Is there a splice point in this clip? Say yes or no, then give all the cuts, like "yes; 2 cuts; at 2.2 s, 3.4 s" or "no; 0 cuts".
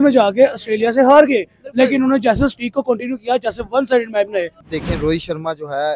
yes; 1 cut; at 4.7 s